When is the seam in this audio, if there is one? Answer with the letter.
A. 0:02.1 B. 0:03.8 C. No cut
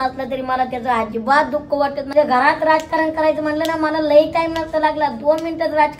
A